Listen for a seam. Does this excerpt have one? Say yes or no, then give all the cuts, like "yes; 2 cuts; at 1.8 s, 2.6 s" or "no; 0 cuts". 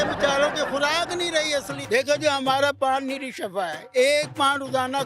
yes; 1 cut; at 1.8 s